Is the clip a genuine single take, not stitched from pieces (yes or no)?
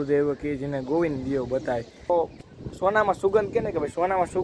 no